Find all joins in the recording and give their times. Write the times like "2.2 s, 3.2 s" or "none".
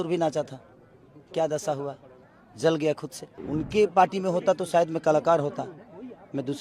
3.3 s

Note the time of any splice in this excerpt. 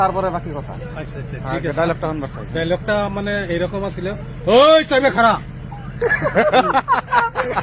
none

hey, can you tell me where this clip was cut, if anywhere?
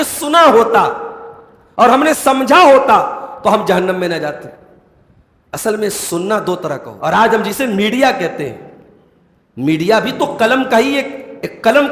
6.9 s

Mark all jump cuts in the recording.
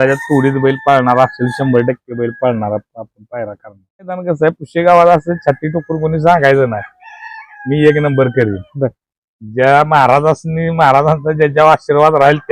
4.2 s

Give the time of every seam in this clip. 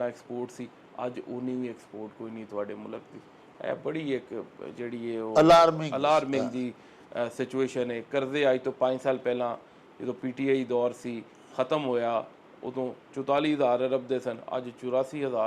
none

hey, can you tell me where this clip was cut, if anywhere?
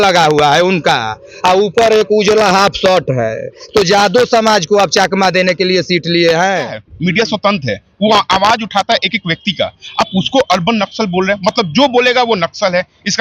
6.9 s

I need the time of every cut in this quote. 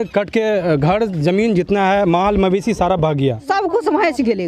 3.4 s

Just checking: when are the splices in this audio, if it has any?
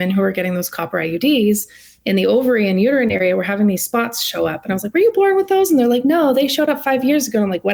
none

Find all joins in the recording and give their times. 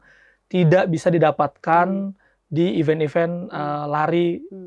none

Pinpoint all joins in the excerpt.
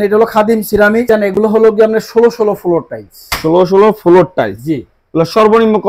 1.1 s

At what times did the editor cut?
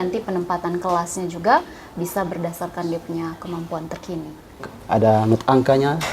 4.7 s

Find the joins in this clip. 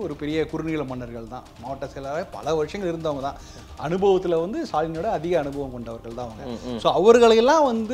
none

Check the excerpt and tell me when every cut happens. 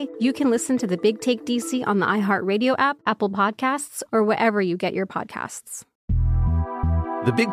5.9 s

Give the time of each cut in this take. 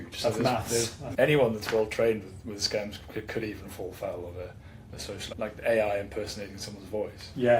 1.0 s, 5.3 s

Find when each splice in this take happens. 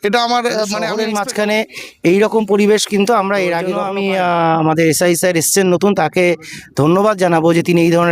0.9 s, 3.8 s

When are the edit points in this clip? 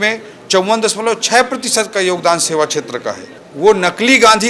3.2 s

